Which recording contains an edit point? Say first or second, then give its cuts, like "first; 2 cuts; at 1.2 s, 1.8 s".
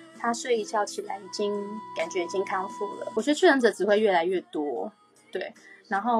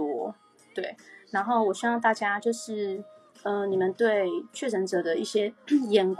first; 1 cut; at 3.2 s